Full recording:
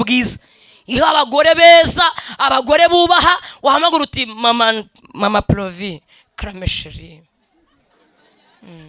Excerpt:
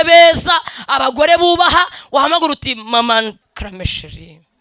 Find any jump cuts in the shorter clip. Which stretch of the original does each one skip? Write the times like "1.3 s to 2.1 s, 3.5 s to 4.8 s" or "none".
5.0 s to 6.3 s